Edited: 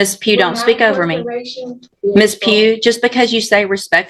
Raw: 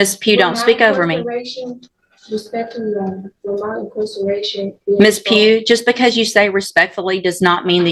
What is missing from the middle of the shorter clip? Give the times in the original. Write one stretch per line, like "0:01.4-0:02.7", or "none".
0:01.9-0:04.7